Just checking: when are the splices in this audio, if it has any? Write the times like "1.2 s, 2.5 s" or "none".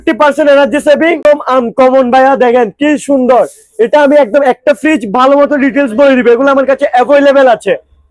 1.2 s